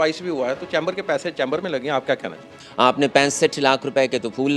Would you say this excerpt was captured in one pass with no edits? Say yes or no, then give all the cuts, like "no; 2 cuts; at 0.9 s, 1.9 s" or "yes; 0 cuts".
no; 1 cut; at 2.6 s